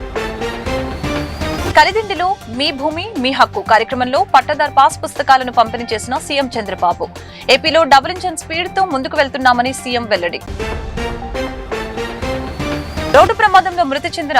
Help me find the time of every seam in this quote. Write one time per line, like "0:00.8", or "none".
0:01.0